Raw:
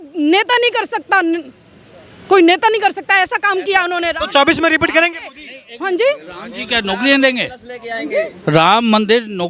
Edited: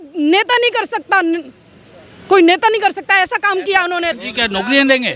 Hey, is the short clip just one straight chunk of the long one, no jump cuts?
no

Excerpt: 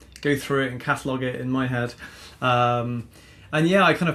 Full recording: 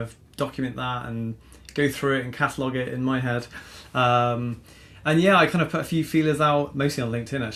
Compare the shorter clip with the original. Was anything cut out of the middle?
no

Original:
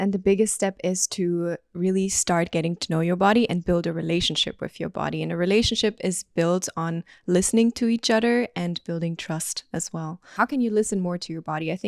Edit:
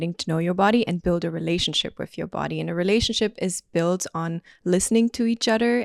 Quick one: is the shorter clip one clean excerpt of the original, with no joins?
yes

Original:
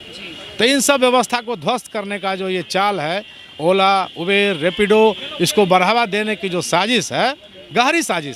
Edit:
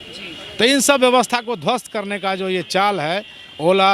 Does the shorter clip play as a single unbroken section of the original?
yes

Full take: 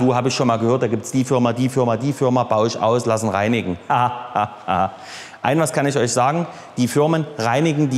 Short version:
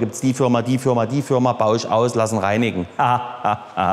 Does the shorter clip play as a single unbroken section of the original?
yes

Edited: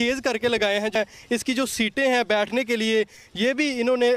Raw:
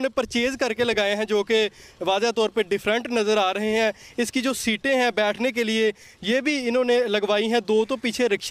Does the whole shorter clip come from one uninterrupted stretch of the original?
no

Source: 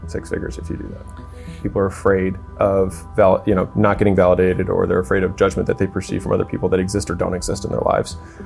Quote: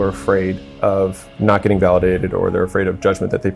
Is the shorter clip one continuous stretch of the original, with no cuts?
no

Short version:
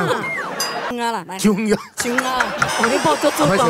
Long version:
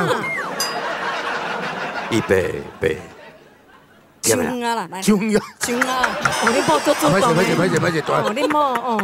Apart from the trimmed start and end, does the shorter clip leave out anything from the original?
yes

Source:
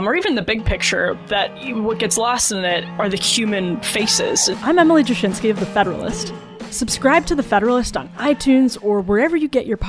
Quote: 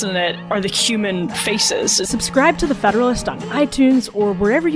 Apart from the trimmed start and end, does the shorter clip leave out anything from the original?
yes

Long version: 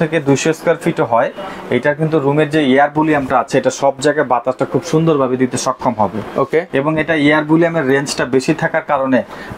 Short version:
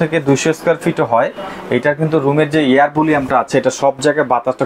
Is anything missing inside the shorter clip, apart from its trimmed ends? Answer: no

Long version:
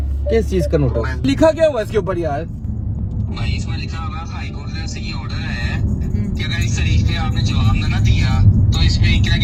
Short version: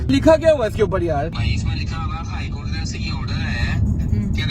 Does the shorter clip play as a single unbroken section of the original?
no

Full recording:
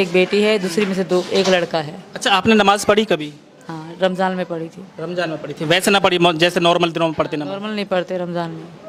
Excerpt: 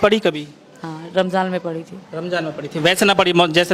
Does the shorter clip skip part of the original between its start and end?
no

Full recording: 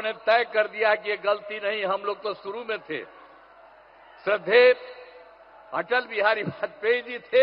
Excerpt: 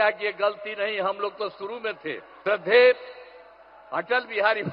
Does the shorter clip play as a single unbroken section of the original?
no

